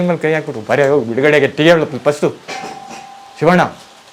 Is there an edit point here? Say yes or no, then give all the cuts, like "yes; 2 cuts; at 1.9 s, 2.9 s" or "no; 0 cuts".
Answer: no; 0 cuts